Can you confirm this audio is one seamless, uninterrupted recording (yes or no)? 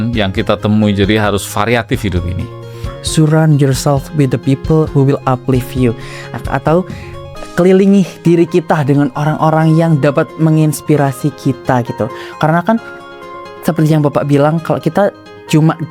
no